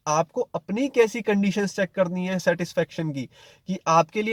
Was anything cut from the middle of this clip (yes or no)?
no